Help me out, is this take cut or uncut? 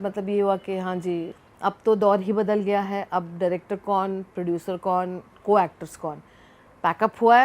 cut